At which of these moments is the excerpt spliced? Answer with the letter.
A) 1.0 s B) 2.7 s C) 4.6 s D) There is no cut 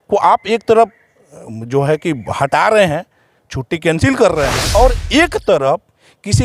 C